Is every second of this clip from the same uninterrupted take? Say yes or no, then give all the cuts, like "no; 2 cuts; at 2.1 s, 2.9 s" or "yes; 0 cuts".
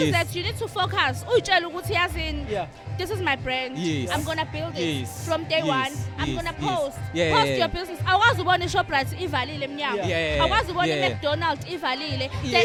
yes; 0 cuts